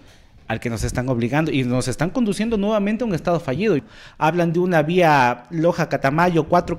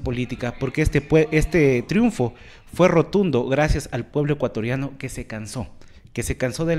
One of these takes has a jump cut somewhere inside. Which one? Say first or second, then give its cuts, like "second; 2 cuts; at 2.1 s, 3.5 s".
first; 1 cut; at 3.8 s